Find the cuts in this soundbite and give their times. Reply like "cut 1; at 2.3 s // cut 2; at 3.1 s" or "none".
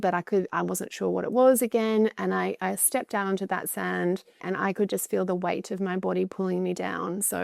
cut 1; at 4.4 s